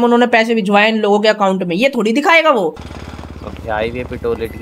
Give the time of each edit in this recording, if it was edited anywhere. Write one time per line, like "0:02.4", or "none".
0:02.9